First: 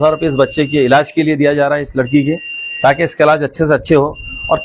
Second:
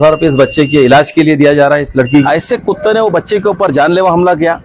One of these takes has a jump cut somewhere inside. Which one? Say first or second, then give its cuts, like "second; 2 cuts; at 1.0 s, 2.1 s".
second; 1 cut; at 2.2 s